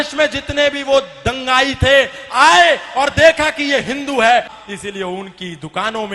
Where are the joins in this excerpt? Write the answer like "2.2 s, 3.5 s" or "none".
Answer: 4.5 s